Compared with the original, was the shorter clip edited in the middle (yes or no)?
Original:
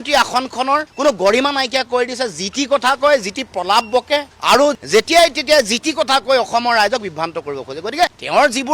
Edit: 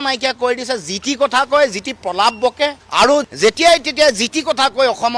no